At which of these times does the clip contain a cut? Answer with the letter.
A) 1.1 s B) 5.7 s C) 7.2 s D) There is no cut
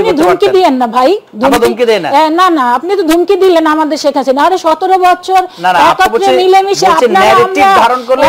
D